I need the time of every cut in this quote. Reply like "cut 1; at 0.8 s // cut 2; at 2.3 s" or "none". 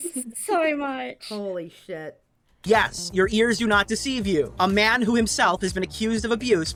none